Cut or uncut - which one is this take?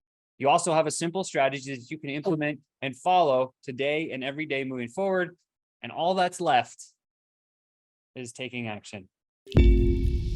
cut